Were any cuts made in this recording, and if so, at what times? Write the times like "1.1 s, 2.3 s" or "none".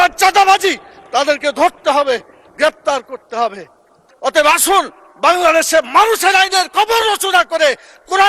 4.1 s